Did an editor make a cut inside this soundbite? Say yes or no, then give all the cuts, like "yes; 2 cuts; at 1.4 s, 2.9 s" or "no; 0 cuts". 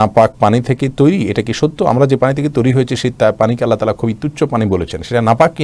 no; 0 cuts